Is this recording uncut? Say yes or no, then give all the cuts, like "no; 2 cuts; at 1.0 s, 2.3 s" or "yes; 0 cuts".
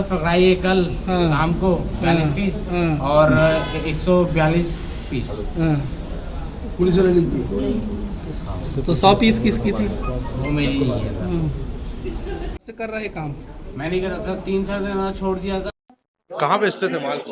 yes; 0 cuts